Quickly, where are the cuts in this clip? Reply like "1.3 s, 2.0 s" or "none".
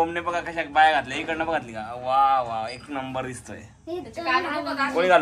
none

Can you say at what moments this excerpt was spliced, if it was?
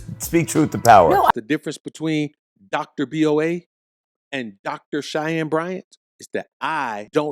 1.3 s

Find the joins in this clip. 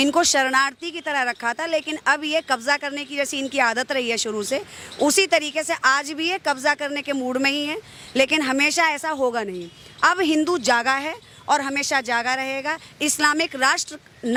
none

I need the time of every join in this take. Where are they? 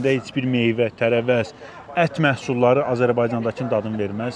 none

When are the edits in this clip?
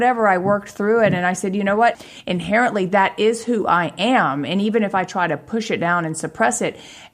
2.0 s

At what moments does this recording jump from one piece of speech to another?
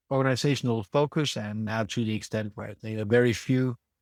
none

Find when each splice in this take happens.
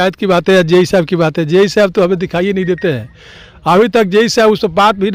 none

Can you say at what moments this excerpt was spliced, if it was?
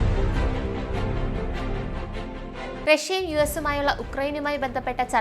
1.0 s

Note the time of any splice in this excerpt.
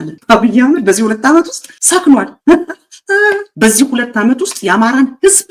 none

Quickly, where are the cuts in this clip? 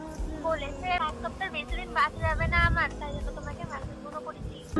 1.0 s

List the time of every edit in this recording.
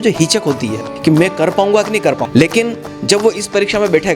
0.9 s, 2.2 s

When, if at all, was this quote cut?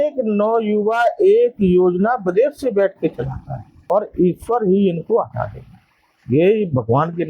3.7 s

